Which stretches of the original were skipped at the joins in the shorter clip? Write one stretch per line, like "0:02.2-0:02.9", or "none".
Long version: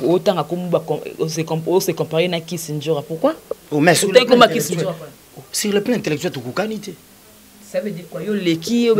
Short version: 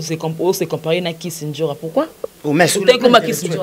none